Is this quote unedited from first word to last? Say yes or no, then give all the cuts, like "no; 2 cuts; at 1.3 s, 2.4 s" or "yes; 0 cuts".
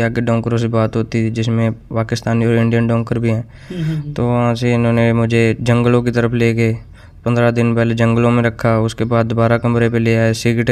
yes; 0 cuts